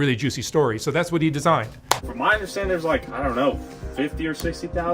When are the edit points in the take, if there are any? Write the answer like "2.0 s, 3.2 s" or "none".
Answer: 2.1 s